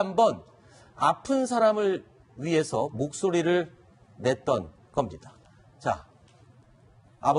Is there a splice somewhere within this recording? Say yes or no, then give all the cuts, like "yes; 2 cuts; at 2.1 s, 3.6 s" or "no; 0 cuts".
yes; 1 cut; at 4.6 s